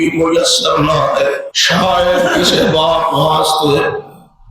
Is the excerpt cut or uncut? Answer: cut